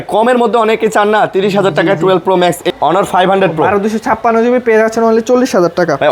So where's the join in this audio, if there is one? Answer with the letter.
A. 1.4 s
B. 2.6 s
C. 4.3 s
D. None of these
B